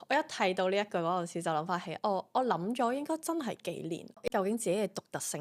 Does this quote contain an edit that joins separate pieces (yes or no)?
yes